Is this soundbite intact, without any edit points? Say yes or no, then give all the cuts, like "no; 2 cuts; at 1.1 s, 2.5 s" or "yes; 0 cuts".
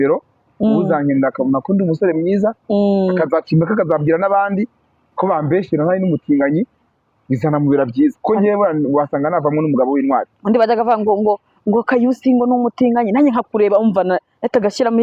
yes; 0 cuts